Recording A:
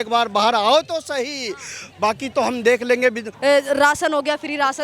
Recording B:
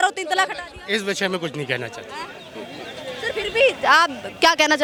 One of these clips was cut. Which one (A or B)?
A